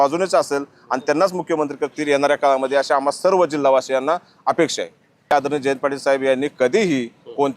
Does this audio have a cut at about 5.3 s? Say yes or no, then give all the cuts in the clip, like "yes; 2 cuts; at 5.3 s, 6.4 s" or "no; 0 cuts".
yes; 1 cut; at 5.3 s